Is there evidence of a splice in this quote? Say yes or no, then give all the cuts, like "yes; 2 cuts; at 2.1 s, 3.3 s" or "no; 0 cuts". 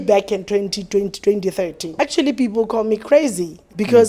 yes; 1 cut; at 1.8 s